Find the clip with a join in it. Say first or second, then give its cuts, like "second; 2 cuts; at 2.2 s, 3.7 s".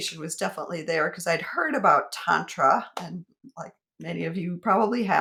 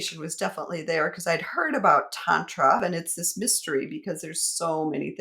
second; 1 cut; at 2.8 s